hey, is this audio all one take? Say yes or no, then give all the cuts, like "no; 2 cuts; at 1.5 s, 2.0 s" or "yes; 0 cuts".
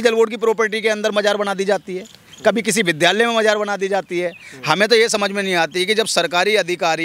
yes; 0 cuts